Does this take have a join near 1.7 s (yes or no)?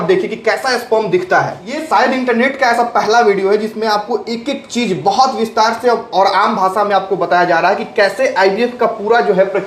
yes